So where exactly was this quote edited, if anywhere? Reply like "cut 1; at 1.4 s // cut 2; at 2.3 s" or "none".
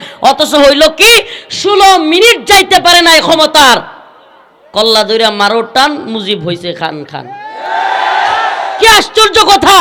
none